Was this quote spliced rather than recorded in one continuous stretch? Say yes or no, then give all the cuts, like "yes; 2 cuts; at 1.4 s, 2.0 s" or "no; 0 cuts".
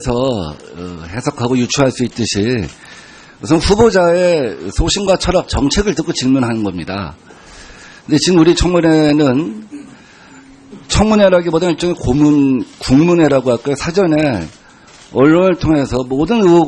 no; 0 cuts